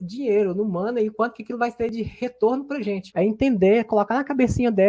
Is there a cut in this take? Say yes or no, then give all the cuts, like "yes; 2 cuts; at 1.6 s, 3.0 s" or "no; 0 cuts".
yes; 1 cut; at 3.1 s